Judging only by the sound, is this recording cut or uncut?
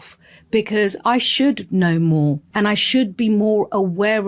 cut